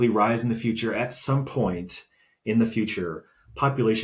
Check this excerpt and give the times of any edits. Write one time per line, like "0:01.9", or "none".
none